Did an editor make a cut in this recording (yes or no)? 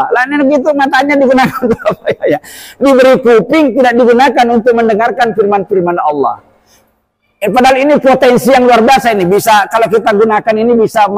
no